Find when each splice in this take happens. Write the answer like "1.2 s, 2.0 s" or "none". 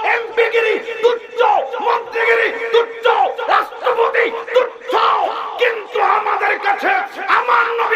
none